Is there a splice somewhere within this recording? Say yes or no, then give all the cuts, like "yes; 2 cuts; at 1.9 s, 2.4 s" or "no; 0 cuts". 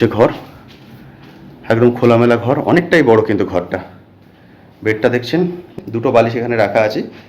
yes; 1 cut; at 5.7 s